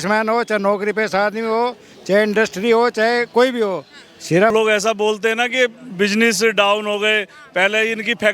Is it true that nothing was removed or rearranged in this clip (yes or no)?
no